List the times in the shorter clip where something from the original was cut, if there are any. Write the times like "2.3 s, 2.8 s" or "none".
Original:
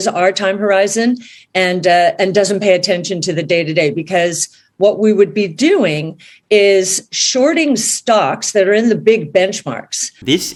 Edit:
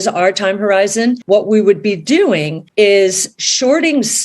1.2 s, 2.6 s